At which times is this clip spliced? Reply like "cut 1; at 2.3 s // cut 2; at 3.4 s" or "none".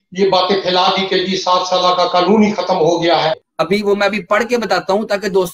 cut 1; at 3.4 s